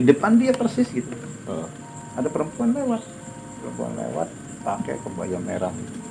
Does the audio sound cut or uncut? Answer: uncut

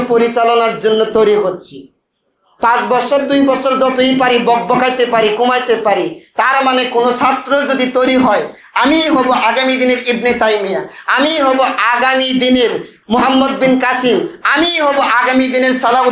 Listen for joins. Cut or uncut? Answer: uncut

